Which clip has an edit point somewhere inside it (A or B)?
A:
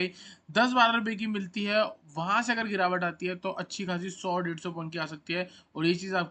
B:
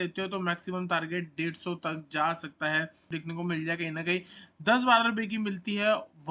B